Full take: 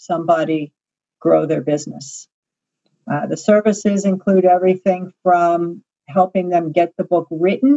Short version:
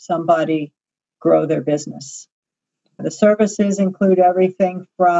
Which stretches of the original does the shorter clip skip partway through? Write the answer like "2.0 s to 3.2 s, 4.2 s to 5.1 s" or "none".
3.0 s to 3.3 s